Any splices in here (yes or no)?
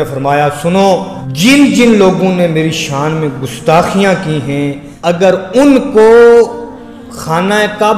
yes